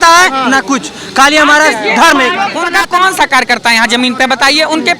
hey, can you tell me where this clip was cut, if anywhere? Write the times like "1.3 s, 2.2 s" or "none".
2.6 s